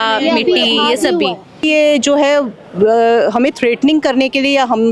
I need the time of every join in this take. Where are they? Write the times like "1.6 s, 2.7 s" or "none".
1.6 s

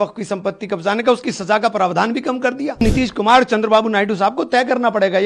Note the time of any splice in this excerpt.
2.8 s

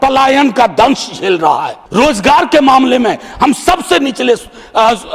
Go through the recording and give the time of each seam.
1.8 s

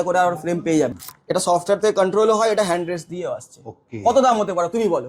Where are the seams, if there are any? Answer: 1.0 s

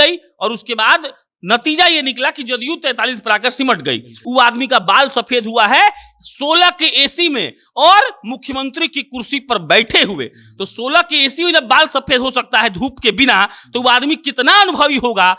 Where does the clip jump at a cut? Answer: 4.1 s

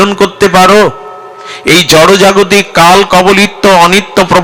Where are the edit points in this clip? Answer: none

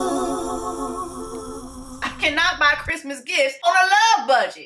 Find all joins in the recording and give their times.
1.8 s, 3.6 s

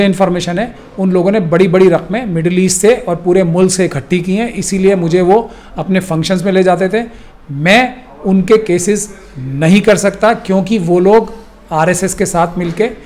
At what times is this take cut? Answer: none

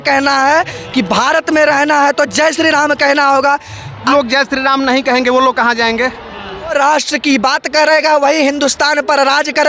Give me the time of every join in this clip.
4.1 s, 6.7 s

